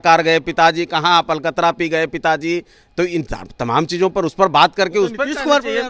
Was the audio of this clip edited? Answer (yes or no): no